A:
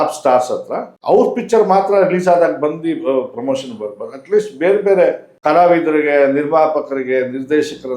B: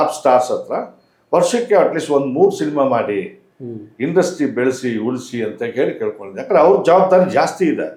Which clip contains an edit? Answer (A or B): A